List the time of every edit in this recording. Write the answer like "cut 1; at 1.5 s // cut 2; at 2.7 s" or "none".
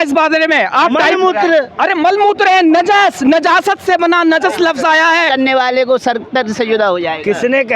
cut 1; at 5.3 s